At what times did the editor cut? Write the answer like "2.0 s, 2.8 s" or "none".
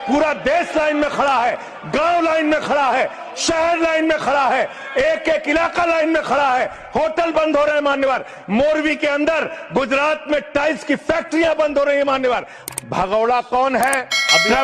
12.5 s